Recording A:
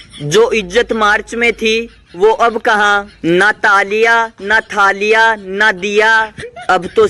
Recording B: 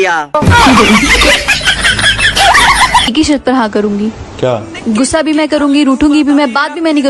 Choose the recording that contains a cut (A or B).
B